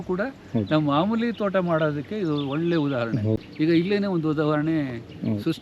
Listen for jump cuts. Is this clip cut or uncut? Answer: cut